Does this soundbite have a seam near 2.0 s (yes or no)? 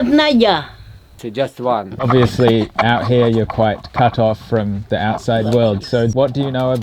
yes